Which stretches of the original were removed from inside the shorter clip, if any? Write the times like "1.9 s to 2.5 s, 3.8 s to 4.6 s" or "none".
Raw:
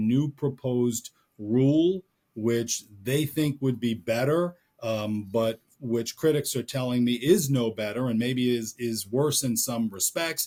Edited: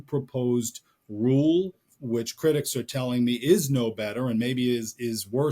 2.2 s to 5.7 s